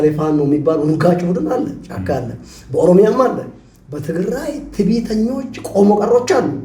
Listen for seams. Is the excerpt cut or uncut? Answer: uncut